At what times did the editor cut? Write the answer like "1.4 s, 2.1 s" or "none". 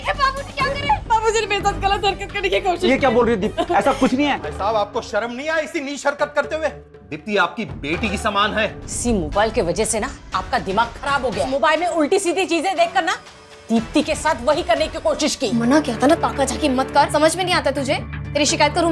1.0 s, 4.5 s, 8.9 s, 11.5 s, 15.5 s, 17.1 s